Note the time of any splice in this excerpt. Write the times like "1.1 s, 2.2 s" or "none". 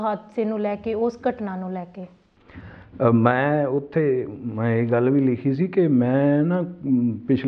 none